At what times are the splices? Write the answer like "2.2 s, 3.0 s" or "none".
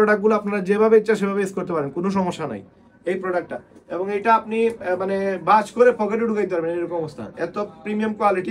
none